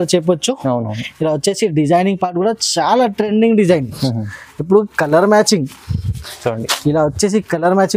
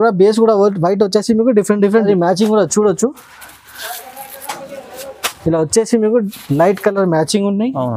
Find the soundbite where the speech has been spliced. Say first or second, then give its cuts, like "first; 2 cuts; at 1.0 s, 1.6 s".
second; 1 cut; at 2.1 s